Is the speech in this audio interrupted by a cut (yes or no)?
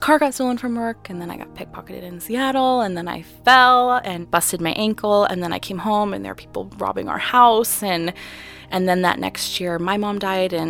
yes